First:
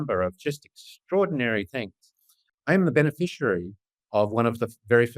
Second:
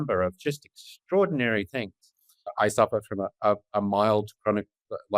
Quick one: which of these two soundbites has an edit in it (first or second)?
first